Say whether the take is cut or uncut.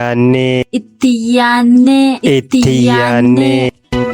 cut